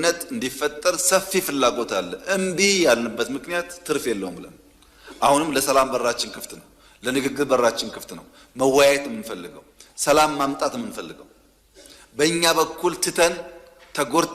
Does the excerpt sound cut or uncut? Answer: uncut